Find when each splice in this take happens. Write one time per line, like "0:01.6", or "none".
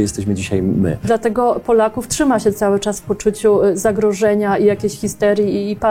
0:01.1